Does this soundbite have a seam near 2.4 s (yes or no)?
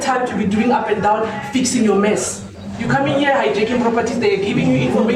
no